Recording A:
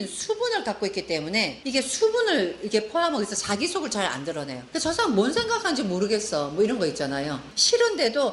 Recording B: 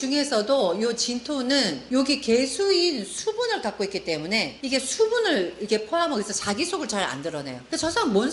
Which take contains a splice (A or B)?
A